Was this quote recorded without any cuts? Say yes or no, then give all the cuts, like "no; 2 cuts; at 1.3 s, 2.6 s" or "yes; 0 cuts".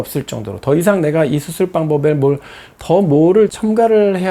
yes; 0 cuts